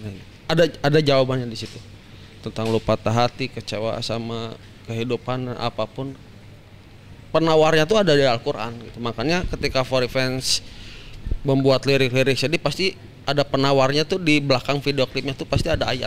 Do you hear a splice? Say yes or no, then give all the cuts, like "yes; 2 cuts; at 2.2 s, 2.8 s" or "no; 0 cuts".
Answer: no; 0 cuts